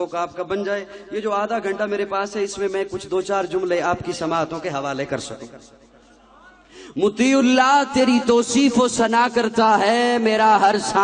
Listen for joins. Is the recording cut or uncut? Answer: uncut